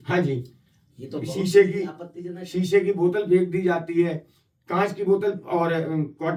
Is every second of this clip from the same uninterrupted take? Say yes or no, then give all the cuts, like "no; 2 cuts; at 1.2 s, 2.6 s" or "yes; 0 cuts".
yes; 0 cuts